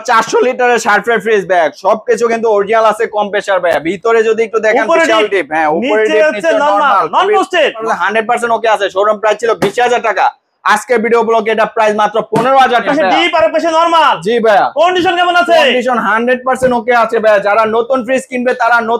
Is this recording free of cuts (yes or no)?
no